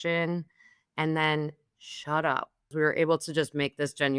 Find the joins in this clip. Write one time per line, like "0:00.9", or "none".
0:02.7

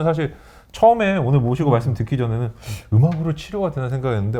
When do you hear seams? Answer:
none

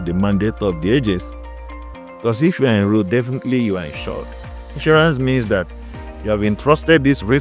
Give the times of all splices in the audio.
none

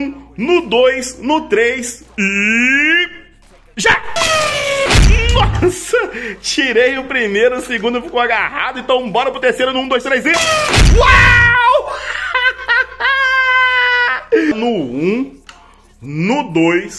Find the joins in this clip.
0:14.5

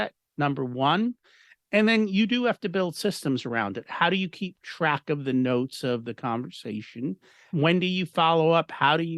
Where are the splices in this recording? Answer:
0:07.5

